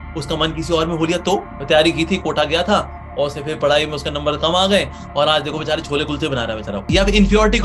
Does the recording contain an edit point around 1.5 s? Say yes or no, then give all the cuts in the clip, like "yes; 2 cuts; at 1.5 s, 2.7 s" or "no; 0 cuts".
yes; 3 cuts; at 1.5 s, 5.0 s, 6.9 s